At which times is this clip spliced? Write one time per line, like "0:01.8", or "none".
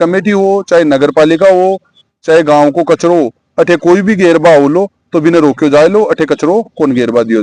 none